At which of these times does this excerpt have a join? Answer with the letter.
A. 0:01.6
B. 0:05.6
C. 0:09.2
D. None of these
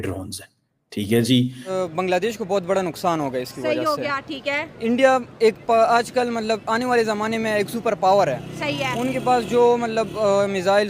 A